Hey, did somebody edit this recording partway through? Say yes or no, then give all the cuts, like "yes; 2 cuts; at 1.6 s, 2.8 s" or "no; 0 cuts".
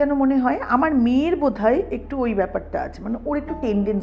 no; 0 cuts